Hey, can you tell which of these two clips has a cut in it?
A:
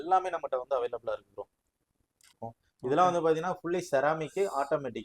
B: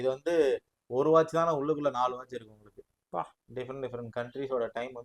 A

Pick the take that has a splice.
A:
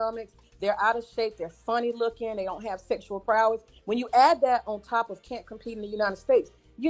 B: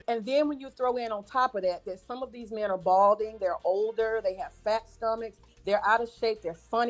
A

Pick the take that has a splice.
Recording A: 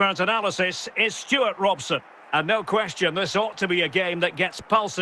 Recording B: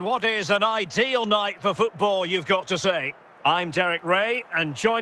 B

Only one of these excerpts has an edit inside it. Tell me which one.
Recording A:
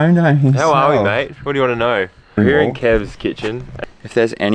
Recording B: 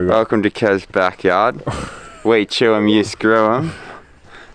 A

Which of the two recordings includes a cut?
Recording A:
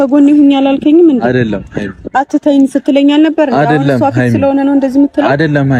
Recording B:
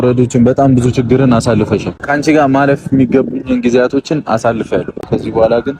B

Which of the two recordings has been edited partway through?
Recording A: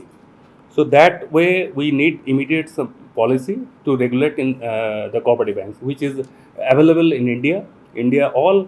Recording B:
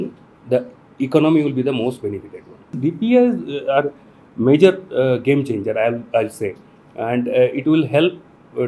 B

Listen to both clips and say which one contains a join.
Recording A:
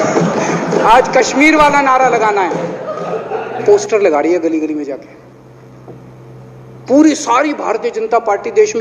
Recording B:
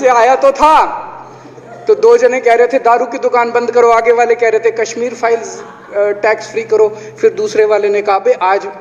A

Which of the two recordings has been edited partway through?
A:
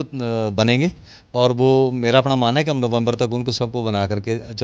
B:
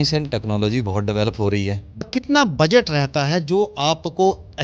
B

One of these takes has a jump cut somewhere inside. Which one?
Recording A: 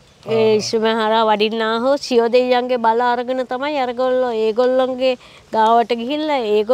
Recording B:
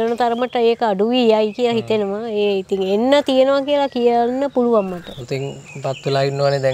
B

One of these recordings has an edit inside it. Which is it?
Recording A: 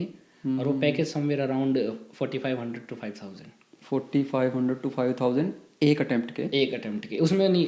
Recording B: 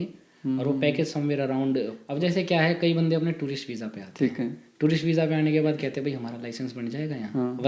B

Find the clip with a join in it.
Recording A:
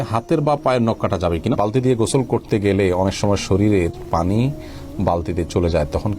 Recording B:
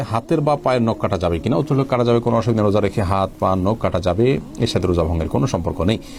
A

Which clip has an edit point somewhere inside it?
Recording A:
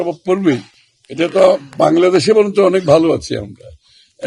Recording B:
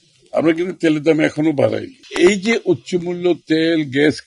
B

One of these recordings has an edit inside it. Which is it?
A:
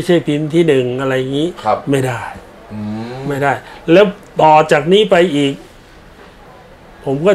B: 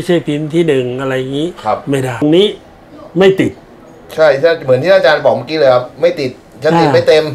B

